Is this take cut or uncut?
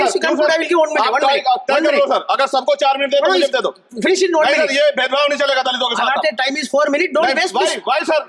uncut